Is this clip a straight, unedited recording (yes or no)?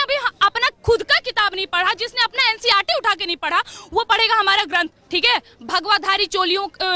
no